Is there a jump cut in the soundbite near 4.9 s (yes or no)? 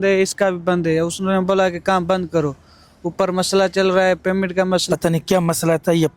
yes